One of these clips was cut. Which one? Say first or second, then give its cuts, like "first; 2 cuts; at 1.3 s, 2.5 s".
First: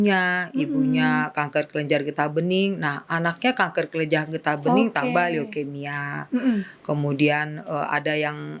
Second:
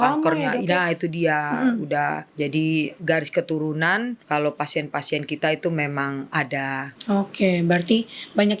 second; 3 cuts; at 2.6 s, 4.2 s, 6.9 s